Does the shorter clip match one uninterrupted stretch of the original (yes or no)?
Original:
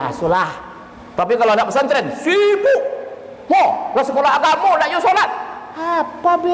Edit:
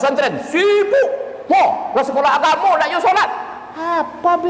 no